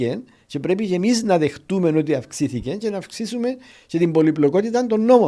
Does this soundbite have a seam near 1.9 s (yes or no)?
no